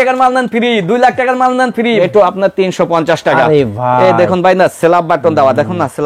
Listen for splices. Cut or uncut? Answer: cut